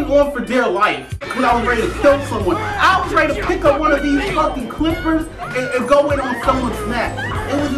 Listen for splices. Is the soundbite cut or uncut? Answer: uncut